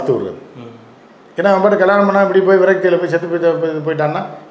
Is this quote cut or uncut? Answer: uncut